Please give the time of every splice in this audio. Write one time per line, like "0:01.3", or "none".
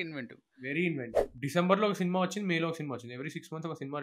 0:00.9